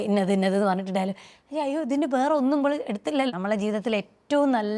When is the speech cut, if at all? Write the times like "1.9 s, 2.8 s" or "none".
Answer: 3.3 s